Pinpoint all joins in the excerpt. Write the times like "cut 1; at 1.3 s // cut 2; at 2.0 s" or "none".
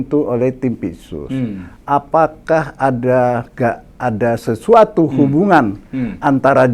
none